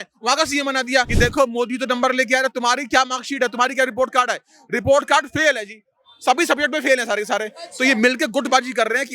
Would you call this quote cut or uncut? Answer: cut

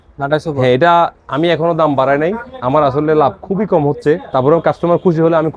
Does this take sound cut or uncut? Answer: uncut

